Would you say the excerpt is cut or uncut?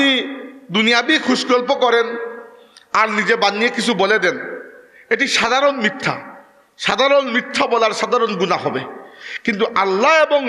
uncut